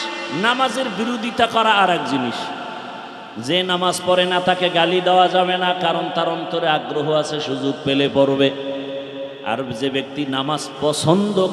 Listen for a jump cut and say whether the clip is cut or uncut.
uncut